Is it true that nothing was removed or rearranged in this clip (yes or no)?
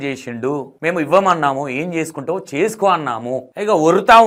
yes